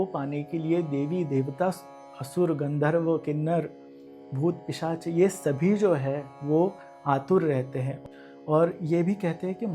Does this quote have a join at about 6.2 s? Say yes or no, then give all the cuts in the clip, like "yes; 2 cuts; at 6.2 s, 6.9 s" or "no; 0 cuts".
no; 1 cut; at 7.9 s